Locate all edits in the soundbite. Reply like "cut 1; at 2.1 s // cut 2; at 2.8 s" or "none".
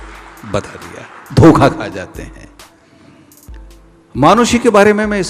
none